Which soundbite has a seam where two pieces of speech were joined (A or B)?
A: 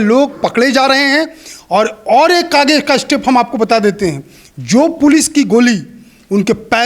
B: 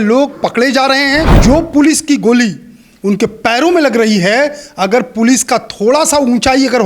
B